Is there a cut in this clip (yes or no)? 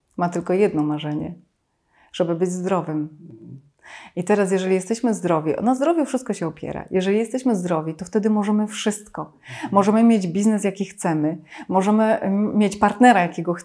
no